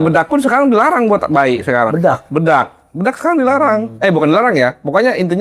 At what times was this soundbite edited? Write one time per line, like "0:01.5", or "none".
none